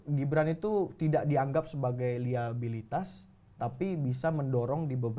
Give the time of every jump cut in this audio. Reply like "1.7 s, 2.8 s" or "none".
none